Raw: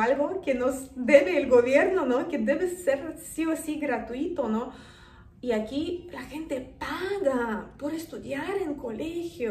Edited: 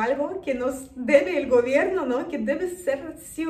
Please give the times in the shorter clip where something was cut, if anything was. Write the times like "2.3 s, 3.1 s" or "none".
none